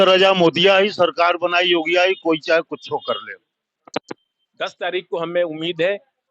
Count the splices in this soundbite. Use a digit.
1